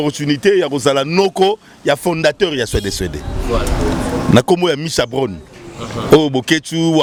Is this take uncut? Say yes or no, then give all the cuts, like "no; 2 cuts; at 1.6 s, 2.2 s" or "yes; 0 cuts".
yes; 0 cuts